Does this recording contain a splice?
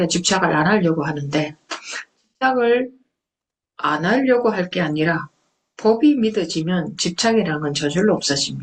no; 0 cuts

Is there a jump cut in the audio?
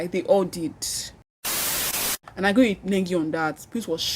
yes; 1 cut; at 1.7 s

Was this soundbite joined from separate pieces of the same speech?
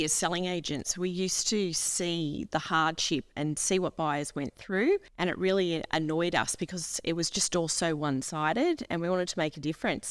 yes; 1 cut; at 5.1 s

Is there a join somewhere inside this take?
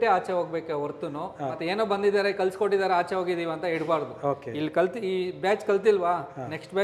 no; 0 cuts

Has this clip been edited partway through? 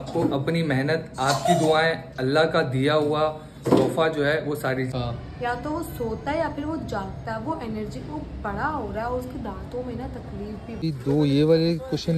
yes; 2 cuts; at 4.9 s, 10.9 s

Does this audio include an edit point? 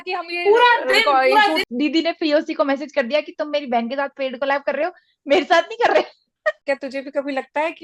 yes; 2 cuts; at 1.6 s, 6.6 s

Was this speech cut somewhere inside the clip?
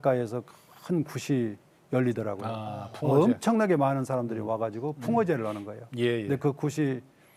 no; 0 cuts

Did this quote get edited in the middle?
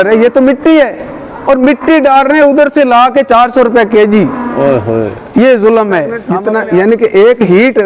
yes; 1 cut; at 6.2 s

